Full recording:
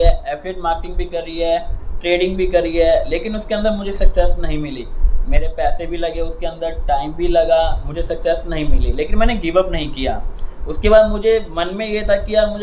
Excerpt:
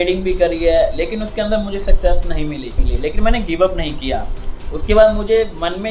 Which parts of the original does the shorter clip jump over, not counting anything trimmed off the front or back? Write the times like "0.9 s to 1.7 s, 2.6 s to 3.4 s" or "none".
5.0 s to 8.8 s